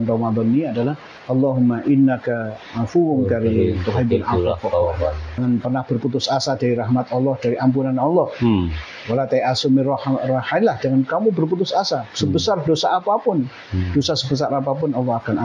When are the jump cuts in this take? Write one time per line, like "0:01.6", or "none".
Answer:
0:01.1
0:05.4